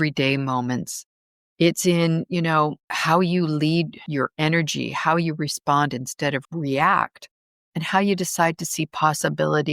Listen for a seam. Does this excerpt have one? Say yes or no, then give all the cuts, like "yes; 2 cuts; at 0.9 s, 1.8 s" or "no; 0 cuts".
yes; 2 cuts; at 2.9 s, 4.0 s